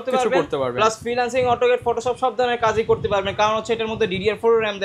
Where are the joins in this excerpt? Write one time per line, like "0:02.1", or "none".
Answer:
none